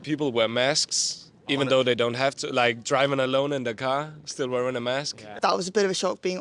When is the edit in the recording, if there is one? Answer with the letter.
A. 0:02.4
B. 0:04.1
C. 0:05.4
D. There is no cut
C